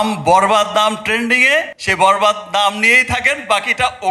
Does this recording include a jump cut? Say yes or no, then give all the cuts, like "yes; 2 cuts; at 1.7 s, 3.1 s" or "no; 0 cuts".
yes; 1 cut; at 1.8 s